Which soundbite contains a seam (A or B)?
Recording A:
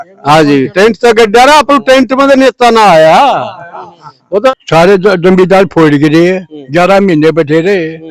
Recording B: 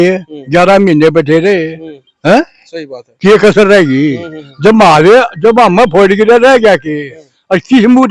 A